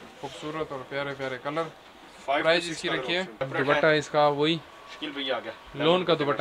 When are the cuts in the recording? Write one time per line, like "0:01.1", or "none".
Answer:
0:03.5